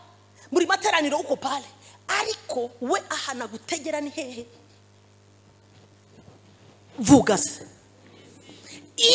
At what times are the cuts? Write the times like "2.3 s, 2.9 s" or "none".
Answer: none